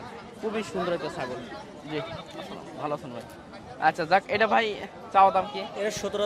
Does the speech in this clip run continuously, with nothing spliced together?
yes; 0 cuts

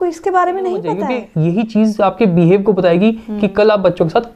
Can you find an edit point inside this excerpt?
yes; 1 cut; at 1.2 s

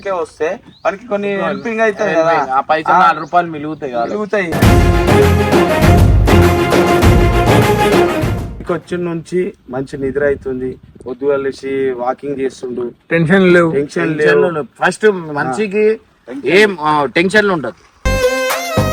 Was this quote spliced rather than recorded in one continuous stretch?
yes; 1 cut; at 8.6 s

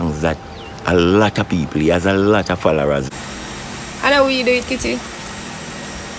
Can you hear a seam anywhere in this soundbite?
yes; 1 cut; at 3.1 s

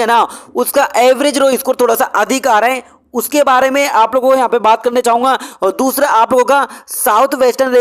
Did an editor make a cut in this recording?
no; 0 cuts

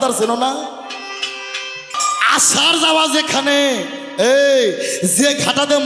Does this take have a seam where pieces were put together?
yes; 1 cut; at 2.0 s

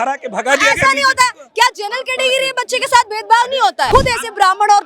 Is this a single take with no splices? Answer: no; 1 cut; at 3.9 s

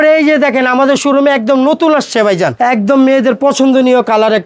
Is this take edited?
yes; 1 cut; at 2.5 s

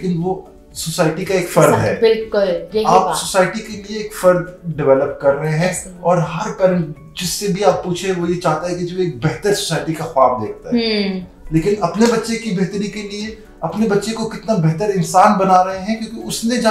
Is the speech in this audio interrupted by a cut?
no; 0 cuts

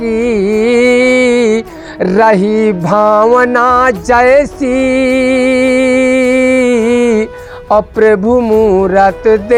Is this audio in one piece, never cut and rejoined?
yes; 0 cuts

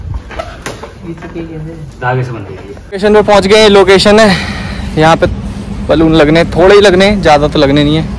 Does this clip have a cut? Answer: yes; 1 cut; at 2.9 s

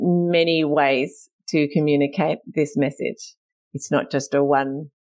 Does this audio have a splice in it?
no; 0 cuts

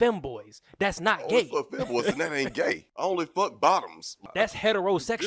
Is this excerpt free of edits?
no; 2 cuts; at 3.1 s, 4.2 s

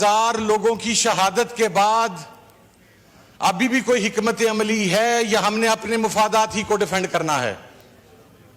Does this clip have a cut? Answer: no; 0 cuts

